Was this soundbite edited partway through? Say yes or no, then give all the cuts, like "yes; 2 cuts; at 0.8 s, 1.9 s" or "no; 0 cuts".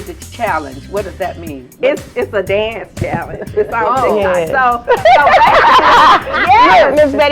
no; 0 cuts